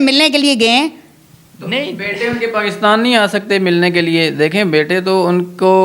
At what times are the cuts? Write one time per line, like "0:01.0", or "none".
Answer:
none

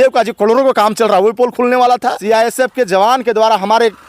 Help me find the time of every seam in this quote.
0:02.2

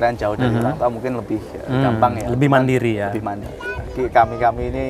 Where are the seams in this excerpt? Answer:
0:03.4

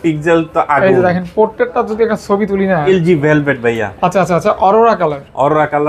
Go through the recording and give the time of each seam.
0:02.8

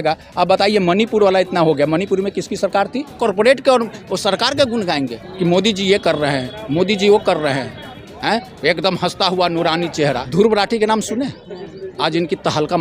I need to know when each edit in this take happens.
0:03.1
0:10.2

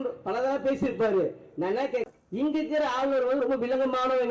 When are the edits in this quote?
0:02.0

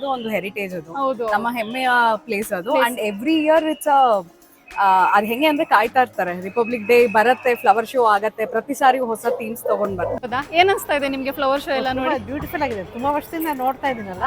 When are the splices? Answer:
0:10.2

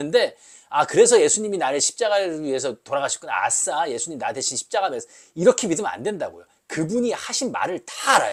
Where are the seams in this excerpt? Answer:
none

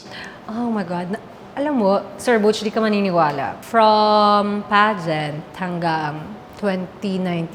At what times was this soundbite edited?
0:03.5

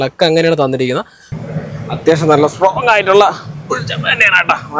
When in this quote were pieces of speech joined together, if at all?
0:01.2

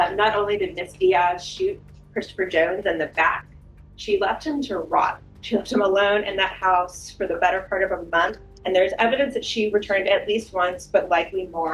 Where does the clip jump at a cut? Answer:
0:05.3
0:08.5

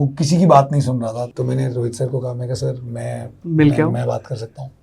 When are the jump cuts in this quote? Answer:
0:01.3

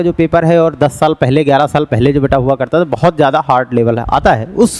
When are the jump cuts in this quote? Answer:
none

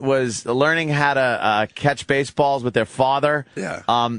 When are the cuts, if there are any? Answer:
none

